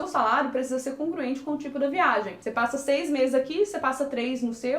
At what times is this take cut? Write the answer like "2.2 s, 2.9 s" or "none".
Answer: 2.4 s